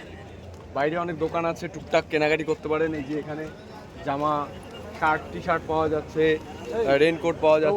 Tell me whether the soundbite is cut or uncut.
uncut